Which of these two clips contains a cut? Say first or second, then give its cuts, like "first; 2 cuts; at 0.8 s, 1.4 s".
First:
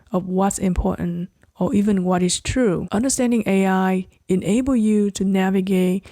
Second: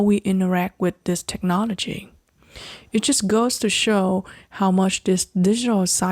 first; 1 cut; at 2.8 s